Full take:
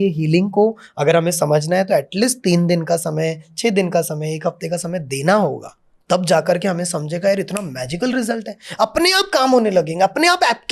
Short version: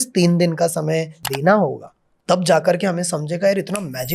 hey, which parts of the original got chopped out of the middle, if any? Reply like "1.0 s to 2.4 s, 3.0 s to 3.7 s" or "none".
3.5 s to 5.0 s